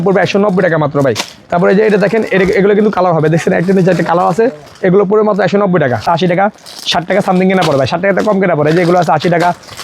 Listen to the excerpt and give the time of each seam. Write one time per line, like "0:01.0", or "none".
0:06.0